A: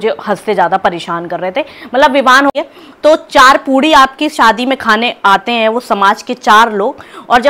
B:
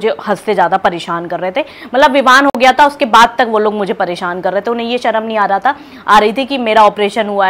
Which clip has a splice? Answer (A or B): A